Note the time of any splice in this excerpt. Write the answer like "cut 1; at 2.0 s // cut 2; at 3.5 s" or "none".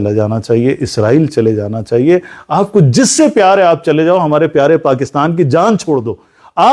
none